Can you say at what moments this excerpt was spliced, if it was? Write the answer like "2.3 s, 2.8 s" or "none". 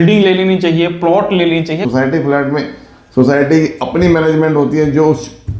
1.9 s